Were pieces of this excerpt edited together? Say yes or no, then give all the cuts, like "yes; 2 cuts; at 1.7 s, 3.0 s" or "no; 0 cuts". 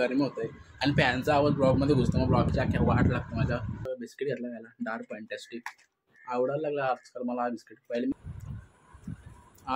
yes; 2 cuts; at 3.9 s, 8.1 s